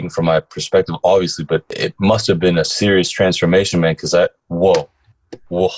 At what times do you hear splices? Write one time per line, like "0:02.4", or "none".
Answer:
0:01.7
0:02.7